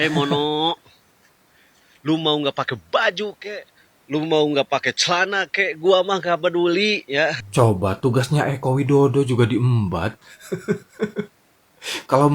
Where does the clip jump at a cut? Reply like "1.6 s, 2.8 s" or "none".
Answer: 7.4 s